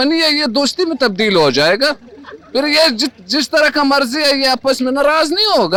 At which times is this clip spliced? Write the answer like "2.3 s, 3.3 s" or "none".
none